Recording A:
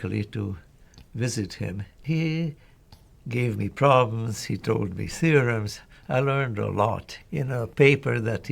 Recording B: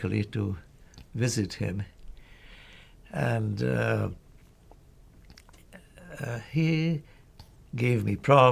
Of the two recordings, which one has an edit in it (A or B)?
A